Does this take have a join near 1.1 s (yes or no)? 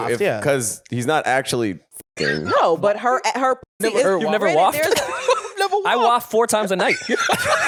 no